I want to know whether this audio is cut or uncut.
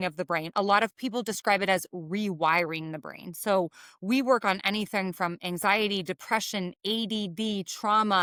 uncut